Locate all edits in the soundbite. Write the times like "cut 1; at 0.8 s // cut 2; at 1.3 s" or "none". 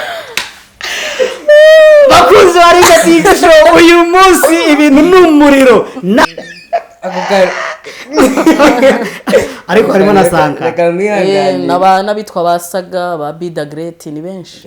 cut 1; at 6.2 s